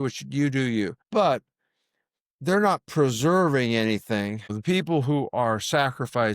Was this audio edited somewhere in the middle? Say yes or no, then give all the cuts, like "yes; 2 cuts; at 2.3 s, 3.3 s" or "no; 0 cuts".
yes; 2 cuts; at 1.0 s, 4.5 s